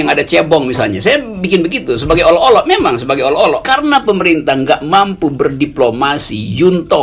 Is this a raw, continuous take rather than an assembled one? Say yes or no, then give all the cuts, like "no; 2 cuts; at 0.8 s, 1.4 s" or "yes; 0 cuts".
no; 1 cut; at 3.6 s